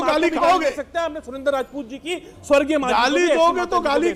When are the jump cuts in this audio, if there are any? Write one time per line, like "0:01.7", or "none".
none

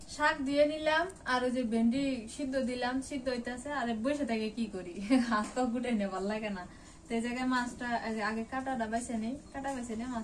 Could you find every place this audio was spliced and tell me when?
none

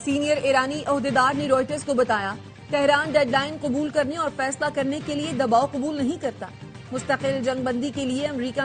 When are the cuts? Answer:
none

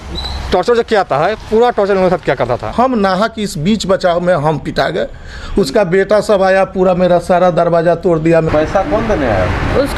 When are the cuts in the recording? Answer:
0:02.7
0:08.5

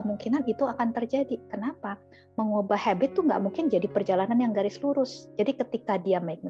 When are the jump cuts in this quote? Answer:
0:05.3

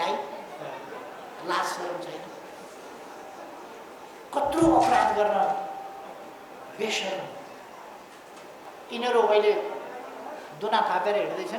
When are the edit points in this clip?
0:08.6

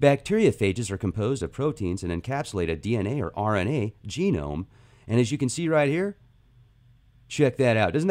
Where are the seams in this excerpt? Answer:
0:05.9

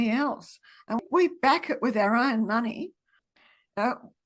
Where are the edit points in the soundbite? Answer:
0:01.0
0:03.3

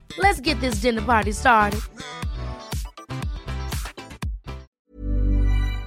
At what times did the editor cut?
0:04.7

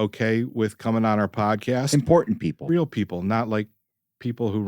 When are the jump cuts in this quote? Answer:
0:02.5

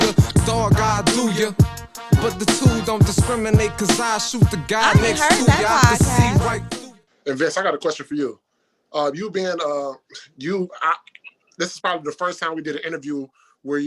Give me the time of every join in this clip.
0:06.6

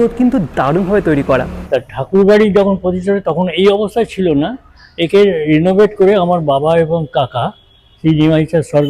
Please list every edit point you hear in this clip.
0:01.6

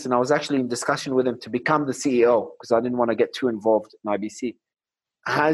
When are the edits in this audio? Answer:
none

